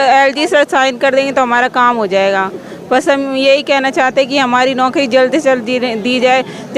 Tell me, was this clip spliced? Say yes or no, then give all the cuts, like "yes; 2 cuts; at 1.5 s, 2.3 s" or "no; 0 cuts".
no; 0 cuts